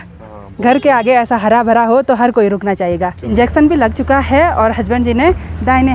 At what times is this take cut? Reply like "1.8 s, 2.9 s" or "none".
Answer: 3.2 s